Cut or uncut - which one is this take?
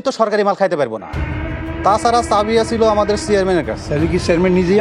cut